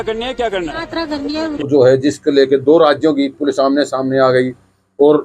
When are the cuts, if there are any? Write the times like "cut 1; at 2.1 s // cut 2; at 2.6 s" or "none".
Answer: cut 1; at 1.7 s